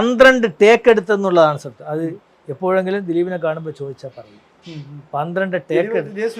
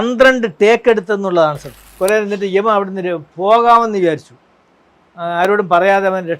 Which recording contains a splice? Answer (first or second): second